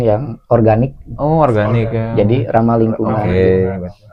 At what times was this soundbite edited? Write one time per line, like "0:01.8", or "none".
none